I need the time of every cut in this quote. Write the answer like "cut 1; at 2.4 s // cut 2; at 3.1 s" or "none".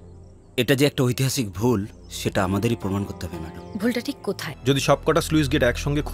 cut 1; at 4.5 s